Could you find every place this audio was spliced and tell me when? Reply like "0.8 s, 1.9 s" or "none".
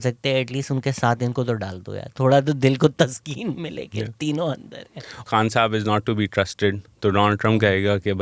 5.2 s

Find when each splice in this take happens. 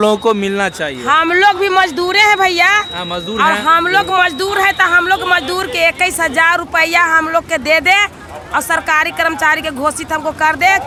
none

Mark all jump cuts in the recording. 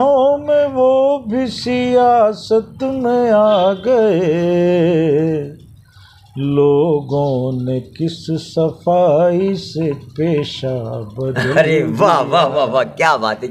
none

